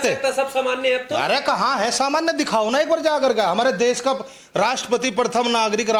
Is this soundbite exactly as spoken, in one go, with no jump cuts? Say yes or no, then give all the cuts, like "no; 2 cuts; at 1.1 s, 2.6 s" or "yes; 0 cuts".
yes; 0 cuts